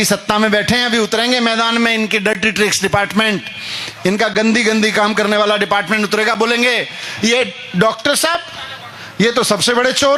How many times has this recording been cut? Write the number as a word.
zero